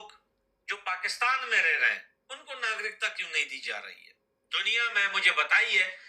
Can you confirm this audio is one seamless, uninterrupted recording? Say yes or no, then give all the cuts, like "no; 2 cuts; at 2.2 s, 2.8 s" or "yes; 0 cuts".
no; 1 cut; at 3.9 s